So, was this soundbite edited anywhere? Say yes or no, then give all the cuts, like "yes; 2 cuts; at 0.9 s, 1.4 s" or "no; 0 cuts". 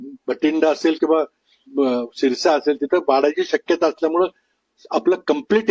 no; 0 cuts